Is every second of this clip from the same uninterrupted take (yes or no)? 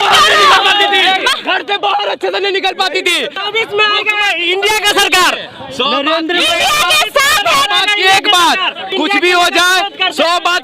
no